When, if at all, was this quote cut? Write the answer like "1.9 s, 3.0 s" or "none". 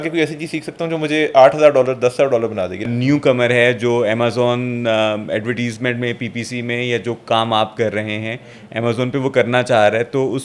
2.8 s

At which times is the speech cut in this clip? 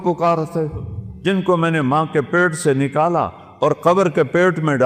none

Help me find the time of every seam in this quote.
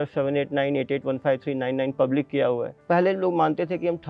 2.7 s

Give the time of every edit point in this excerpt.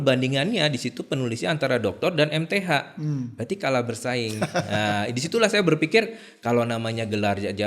none

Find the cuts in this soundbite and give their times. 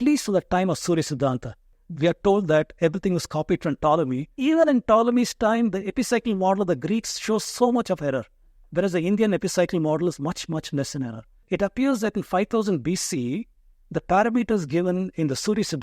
1.7 s, 4.3 s, 11.4 s

